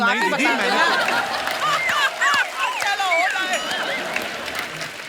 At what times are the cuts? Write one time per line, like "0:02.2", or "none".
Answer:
none